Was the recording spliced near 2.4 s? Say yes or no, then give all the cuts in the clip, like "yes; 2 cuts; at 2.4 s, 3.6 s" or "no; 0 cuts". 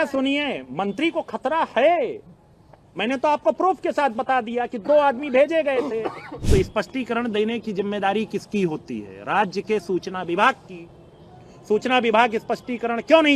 no; 1 cut; at 6.3 s